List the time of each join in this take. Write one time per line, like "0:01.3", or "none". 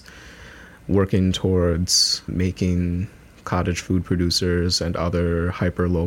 0:02.3